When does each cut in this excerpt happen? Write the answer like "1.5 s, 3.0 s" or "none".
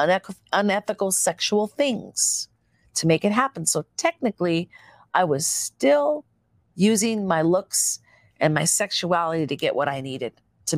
none